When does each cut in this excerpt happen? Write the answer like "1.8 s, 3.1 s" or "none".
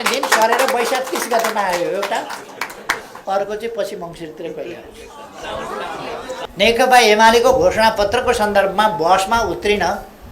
3.1 s, 6.3 s

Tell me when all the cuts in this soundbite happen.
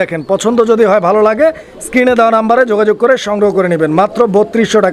none

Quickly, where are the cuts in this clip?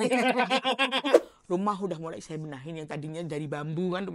1.2 s

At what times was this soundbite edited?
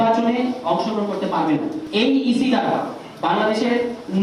1.8 s

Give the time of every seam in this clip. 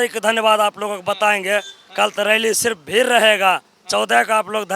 none

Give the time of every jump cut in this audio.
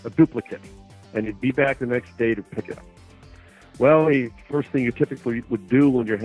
none

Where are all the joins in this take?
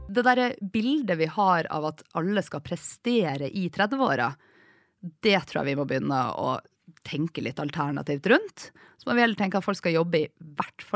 none

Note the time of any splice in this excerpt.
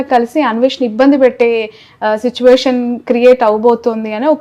none

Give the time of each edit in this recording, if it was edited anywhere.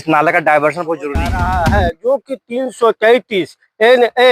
1.4 s

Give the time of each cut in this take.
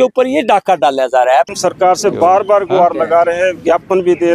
1.5 s

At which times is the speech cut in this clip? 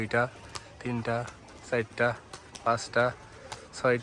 none

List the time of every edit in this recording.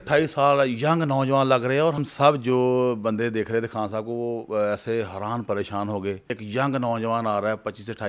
2.0 s, 6.4 s

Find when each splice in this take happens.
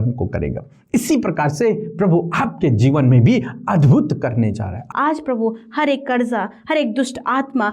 4.8 s

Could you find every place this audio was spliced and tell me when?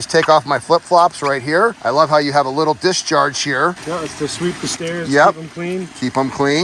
none

